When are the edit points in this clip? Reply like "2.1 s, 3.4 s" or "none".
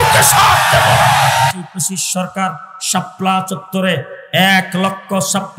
1.5 s